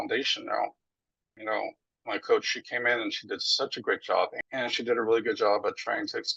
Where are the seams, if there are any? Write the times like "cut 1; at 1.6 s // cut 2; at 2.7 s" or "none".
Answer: cut 1; at 1.4 s // cut 2; at 4.3 s